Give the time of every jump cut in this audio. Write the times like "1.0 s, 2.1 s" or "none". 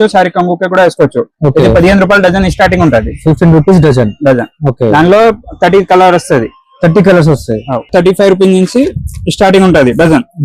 7.9 s